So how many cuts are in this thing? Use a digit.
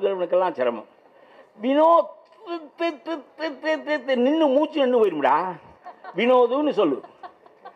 0